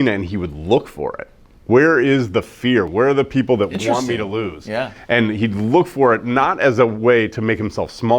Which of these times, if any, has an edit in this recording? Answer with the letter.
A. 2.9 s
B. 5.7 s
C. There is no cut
A